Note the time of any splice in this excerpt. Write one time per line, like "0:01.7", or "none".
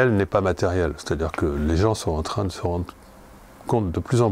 none